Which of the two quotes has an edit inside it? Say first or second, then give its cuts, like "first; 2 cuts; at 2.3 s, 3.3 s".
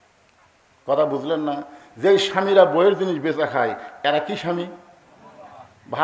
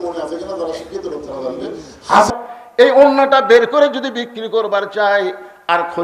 second; 1 cut; at 2.3 s